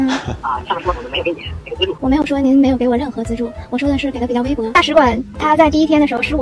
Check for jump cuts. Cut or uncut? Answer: cut